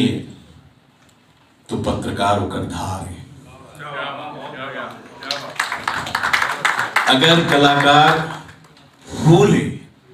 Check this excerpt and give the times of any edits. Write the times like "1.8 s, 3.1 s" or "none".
none